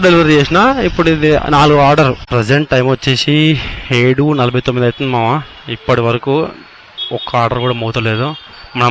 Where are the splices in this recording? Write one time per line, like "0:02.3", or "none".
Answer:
0:02.2